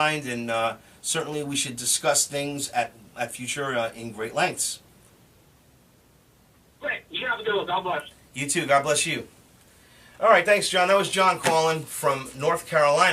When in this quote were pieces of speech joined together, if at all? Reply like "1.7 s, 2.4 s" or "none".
10.6 s